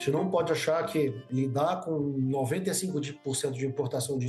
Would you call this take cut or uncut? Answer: cut